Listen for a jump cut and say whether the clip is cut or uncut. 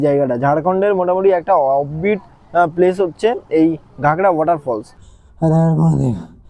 cut